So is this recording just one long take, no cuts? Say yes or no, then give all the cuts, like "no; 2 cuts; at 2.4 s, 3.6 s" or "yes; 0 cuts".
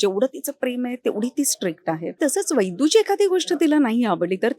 no; 1 cut; at 2.2 s